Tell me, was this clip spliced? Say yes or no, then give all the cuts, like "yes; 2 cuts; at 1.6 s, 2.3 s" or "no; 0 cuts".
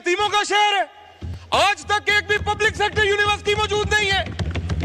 no; 0 cuts